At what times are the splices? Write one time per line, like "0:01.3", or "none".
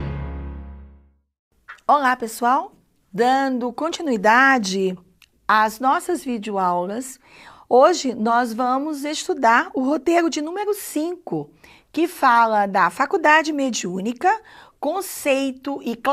none

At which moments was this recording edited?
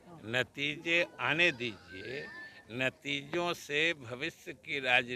none

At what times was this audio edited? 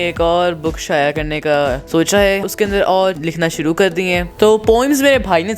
0:01.8
0:02.5
0:03.2
0:04.4

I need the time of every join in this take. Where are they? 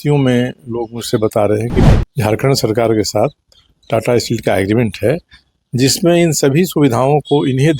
0:01.9

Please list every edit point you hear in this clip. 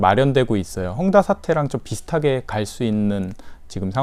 none

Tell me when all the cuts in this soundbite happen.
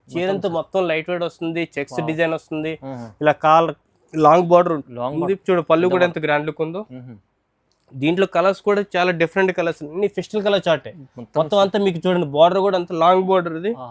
none

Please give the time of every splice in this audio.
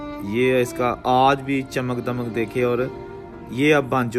none

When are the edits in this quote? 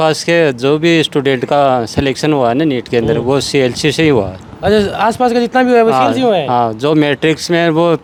none

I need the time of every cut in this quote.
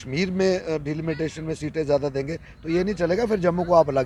none

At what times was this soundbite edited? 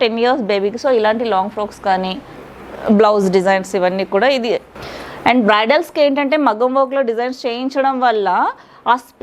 0:02.4
0:04.7

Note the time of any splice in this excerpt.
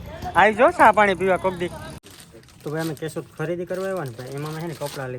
0:02.2

